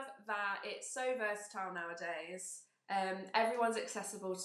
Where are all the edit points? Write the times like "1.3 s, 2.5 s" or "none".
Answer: none